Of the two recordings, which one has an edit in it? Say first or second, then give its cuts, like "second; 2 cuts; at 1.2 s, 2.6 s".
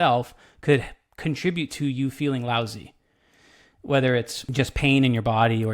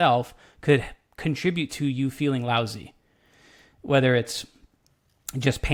first; 1 cut; at 4.4 s